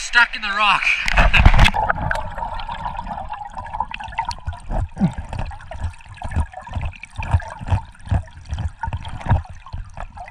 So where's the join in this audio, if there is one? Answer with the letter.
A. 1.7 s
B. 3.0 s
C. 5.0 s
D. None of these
A